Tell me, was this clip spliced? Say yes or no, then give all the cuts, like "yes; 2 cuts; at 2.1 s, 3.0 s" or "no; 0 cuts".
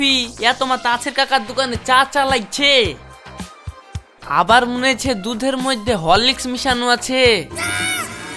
no; 0 cuts